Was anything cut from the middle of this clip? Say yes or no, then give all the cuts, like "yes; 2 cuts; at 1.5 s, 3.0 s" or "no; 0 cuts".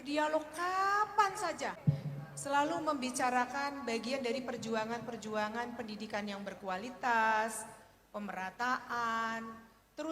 yes; 1 cut; at 1.8 s